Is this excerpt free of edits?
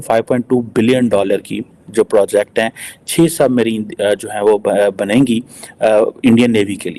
yes; 0 cuts

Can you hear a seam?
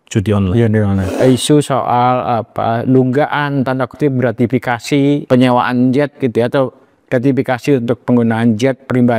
yes; 2 cuts; at 1.2 s, 5.2 s

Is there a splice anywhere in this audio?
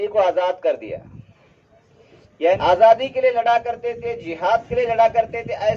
yes; 1 cut; at 2.6 s

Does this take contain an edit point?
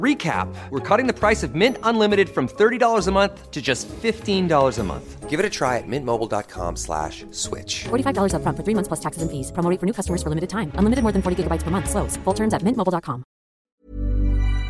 yes; 1 cut; at 13.8 s

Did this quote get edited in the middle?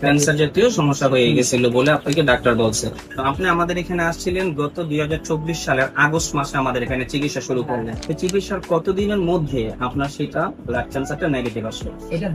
yes; 2 cuts; at 3.1 s, 8.0 s

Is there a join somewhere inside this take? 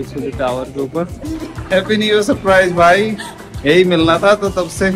yes; 1 cut; at 1.2 s

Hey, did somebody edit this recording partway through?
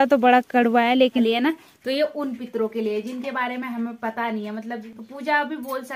yes; 2 cuts; at 1.2 s, 4.8 s

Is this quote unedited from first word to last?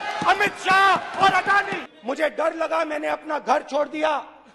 no; 1 cut; at 1.8 s

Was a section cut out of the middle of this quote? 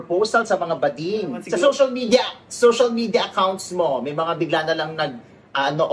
yes; 1 cut; at 1.4 s

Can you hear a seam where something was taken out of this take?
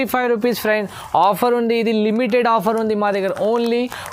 no; 0 cuts

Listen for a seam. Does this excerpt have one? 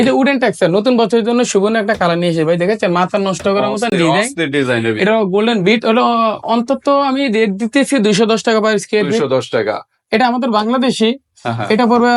no; 0 cuts

